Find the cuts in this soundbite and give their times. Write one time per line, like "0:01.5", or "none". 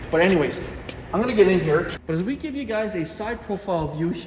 0:01.9